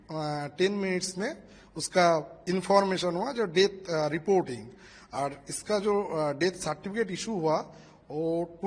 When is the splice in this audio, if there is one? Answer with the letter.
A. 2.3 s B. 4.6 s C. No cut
C